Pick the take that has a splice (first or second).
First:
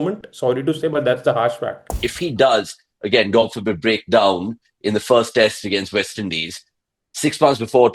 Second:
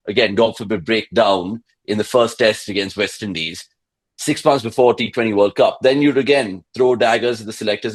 first